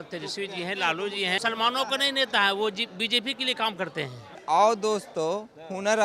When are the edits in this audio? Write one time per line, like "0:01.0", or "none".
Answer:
0:01.4
0:04.4